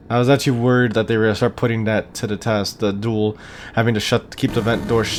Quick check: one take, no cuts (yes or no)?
yes